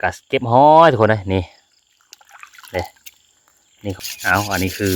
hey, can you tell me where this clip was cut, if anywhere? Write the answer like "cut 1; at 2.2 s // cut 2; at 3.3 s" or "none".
cut 1; at 4.0 s